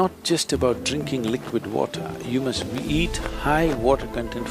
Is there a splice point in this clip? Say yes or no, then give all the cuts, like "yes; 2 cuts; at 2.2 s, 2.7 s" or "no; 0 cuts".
no; 0 cuts